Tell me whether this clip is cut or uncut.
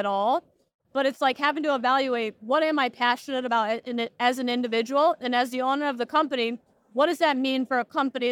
uncut